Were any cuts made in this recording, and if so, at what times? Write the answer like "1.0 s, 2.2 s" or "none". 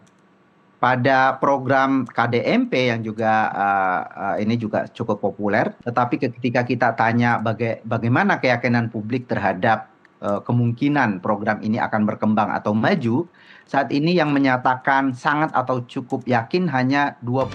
5.8 s